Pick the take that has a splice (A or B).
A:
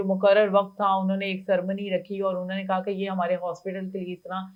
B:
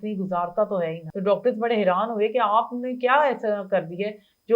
B